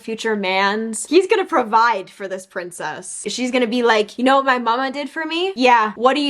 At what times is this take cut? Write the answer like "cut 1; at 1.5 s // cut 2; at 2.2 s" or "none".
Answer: cut 1; at 1.0 s // cut 2; at 3.3 s